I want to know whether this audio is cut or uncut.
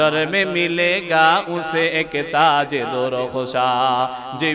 uncut